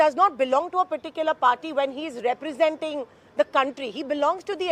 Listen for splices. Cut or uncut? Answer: uncut